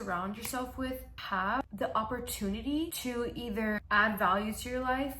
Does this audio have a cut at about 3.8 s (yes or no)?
yes